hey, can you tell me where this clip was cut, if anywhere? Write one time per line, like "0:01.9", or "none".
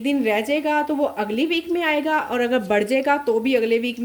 none